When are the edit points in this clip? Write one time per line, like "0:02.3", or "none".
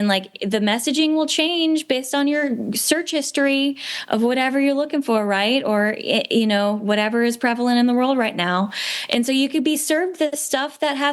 none